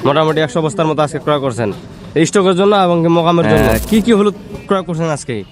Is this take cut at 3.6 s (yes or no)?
yes